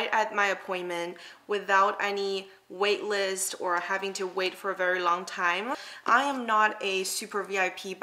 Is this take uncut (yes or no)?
yes